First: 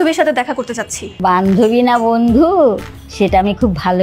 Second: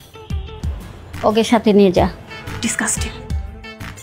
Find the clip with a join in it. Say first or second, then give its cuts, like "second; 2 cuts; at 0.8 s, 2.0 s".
first; 1 cut; at 1.0 s